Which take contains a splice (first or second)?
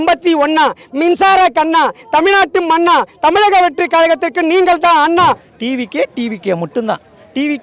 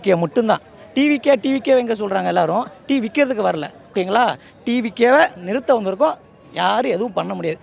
first